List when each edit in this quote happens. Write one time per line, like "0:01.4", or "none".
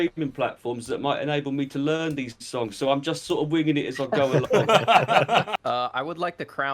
0:05.5